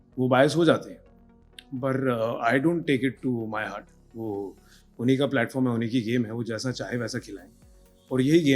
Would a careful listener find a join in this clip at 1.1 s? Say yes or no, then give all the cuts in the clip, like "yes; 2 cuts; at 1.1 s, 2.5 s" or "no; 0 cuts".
no; 0 cuts